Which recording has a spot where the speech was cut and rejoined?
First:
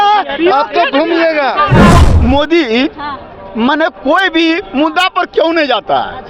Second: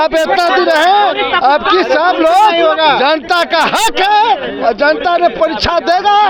first; 1 cut; at 1.9 s

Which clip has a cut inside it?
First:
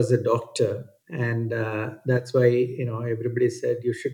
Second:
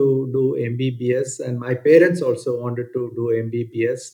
first; 1 cut; at 1.0 s

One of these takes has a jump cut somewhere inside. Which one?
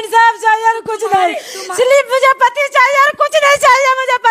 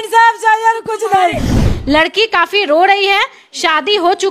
second; 1 cut; at 1.6 s

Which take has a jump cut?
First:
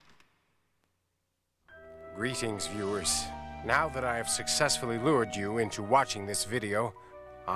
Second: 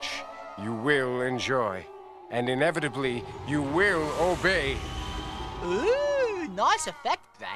second; 1 cut; at 6.5 s

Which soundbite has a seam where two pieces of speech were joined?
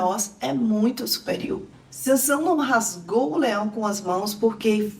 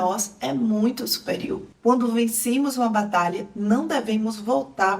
second; 1 cut; at 1.7 s

